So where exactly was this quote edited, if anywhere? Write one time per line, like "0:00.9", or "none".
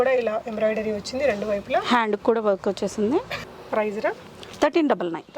none